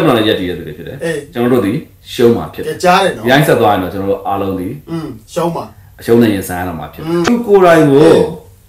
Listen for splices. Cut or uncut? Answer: cut